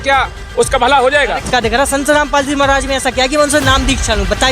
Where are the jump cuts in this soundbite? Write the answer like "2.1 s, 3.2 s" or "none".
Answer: 1.5 s